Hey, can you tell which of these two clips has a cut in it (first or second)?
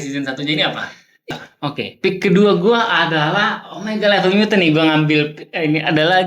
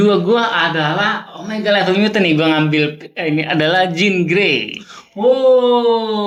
first